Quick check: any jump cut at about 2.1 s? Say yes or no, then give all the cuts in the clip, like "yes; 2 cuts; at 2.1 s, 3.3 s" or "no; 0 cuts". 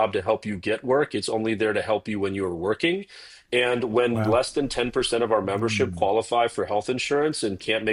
no; 0 cuts